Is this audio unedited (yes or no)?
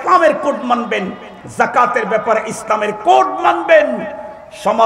yes